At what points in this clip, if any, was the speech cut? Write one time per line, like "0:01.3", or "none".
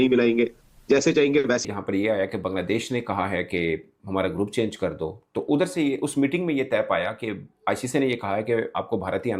0:01.6